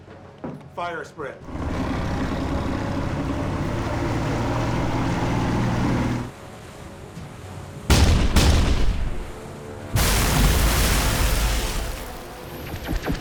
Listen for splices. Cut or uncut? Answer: uncut